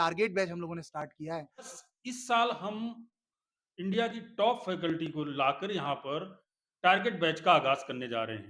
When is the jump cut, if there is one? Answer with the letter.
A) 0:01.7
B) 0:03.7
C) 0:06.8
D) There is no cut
A